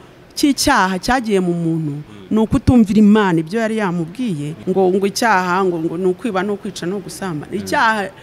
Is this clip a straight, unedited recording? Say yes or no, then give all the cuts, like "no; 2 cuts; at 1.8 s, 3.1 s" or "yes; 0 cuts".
no; 1 cut; at 4.5 s